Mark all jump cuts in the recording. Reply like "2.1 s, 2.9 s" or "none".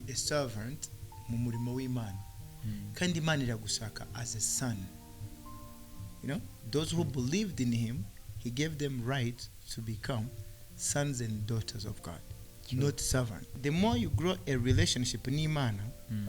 13.5 s